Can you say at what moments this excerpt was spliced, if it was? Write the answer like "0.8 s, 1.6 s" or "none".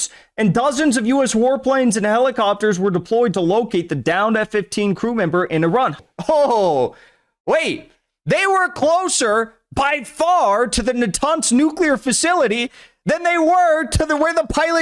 6.1 s